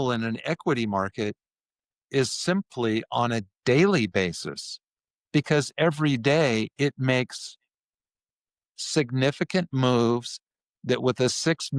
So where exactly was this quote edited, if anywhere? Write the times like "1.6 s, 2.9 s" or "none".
none

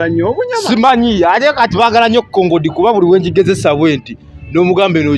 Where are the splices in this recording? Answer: none

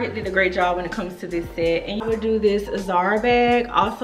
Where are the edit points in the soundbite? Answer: 2.0 s

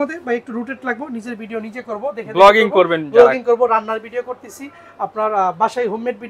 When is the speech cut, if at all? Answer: none

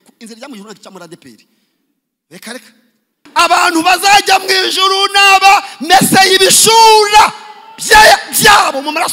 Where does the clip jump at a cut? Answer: 3.2 s

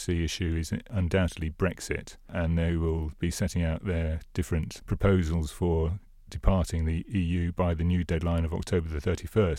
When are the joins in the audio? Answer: 0.9 s, 2.3 s, 4.8 s, 7.0 s

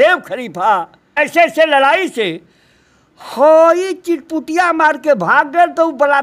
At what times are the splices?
1.2 s

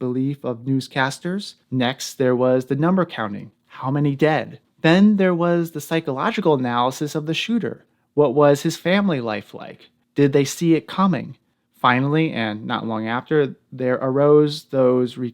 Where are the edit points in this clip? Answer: 1.6 s, 4.6 s

